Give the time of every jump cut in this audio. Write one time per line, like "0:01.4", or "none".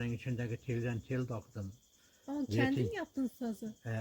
none